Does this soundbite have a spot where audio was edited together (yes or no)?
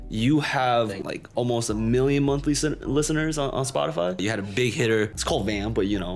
yes